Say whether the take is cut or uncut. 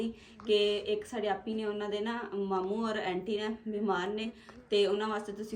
uncut